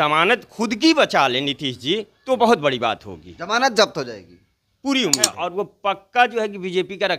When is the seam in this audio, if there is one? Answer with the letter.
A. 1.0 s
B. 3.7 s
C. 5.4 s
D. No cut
C